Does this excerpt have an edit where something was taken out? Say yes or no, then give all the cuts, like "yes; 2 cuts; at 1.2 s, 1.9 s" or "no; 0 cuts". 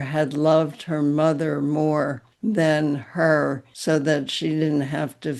yes; 2 cuts; at 2.3 s, 3.7 s